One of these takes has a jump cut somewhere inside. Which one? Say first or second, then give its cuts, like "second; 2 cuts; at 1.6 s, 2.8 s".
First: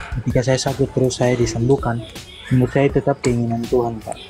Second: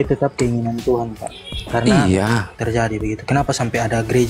second; 1 cut; at 2.6 s